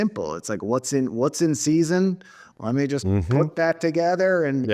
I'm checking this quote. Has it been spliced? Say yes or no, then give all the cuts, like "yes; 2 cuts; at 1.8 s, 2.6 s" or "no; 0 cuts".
no; 0 cuts